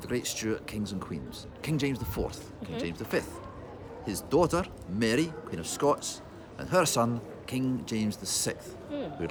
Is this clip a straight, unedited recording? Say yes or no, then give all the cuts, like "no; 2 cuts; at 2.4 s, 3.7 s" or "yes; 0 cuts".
yes; 0 cuts